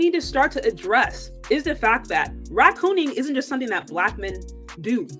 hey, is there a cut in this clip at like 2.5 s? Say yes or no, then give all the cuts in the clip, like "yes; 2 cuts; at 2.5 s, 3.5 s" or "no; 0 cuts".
no; 0 cuts